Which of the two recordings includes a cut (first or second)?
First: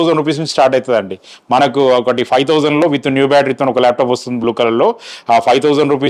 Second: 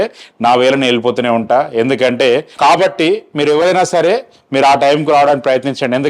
second